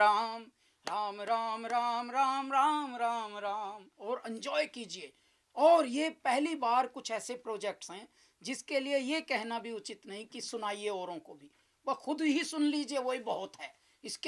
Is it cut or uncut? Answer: cut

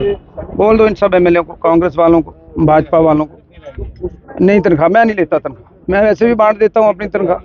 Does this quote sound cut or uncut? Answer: uncut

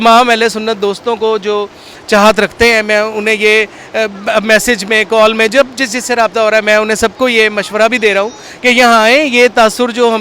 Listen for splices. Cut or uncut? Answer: uncut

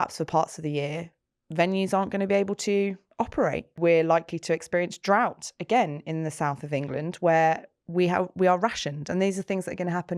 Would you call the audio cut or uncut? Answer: cut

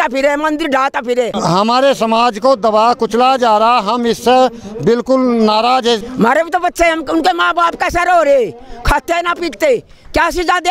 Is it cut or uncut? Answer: cut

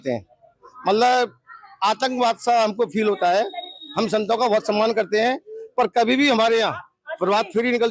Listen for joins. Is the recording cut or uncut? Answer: uncut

